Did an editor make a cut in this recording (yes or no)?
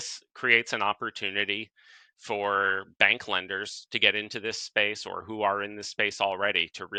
no